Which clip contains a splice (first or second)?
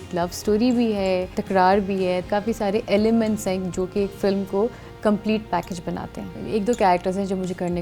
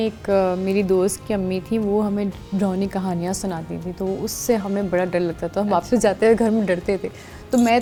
first